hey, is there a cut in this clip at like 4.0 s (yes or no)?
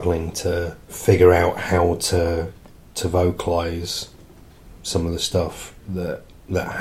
no